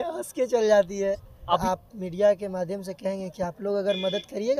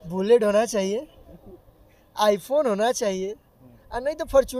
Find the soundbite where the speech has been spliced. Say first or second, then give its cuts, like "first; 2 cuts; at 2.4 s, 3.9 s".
first; 1 cut; at 1.6 s